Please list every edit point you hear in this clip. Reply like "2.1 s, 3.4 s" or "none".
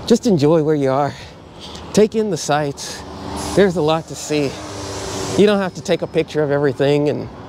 none